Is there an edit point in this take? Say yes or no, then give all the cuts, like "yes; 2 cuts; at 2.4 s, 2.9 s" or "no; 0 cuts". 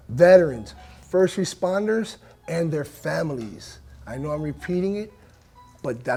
no; 0 cuts